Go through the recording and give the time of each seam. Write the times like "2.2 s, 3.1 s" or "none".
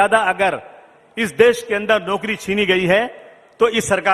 none